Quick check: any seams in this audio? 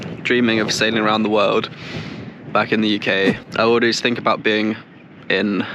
yes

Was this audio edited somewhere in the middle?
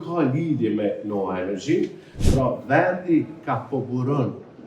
yes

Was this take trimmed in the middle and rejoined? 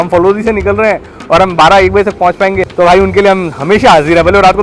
no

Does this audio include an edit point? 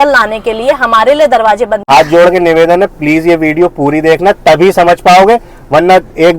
yes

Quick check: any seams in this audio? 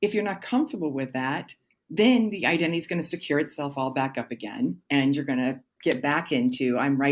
yes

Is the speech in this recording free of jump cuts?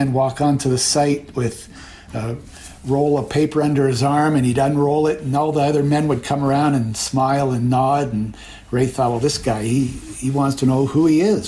yes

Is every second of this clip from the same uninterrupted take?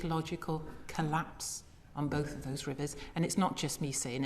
yes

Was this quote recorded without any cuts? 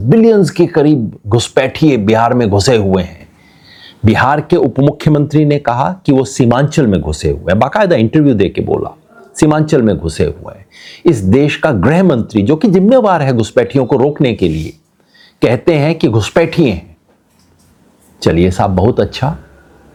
yes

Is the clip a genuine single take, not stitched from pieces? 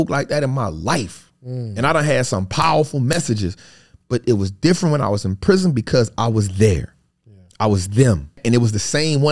no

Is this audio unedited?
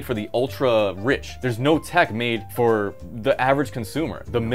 no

